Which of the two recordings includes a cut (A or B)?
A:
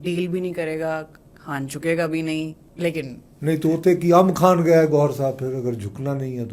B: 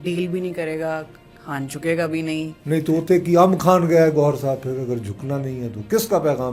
B